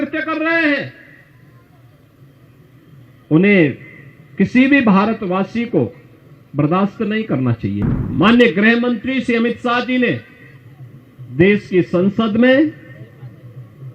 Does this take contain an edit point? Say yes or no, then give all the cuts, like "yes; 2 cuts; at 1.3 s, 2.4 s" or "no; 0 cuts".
yes; 1 cut; at 7.8 s